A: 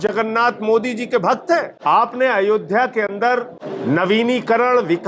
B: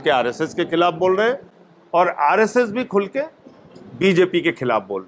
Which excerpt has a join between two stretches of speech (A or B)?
A